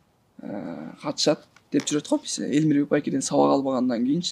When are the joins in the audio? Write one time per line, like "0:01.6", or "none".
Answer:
none